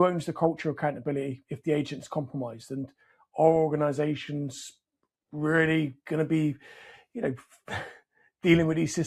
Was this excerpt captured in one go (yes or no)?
yes